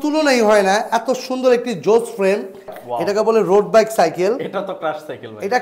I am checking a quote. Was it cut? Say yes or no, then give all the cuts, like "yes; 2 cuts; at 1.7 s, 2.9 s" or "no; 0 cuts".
yes; 1 cut; at 2.8 s